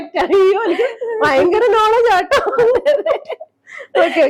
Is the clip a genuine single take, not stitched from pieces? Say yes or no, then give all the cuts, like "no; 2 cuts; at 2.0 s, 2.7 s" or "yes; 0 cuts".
yes; 0 cuts